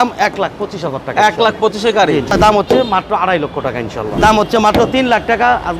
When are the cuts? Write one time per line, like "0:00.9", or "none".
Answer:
0:02.3
0:04.1